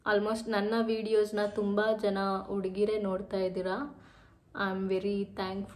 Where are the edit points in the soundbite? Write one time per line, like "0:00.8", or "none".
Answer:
none